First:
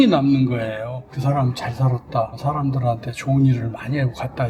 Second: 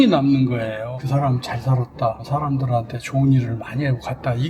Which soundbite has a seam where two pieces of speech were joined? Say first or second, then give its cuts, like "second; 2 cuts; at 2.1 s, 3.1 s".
second; 1 cut; at 1.0 s